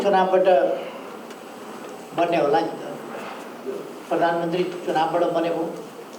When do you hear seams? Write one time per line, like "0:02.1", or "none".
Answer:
none